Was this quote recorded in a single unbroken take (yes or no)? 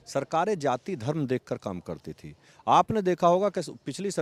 yes